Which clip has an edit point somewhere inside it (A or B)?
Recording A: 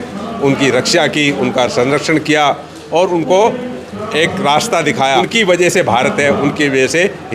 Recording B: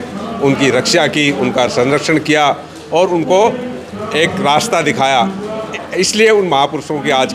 A